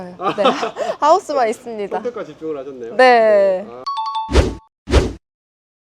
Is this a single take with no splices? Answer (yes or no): yes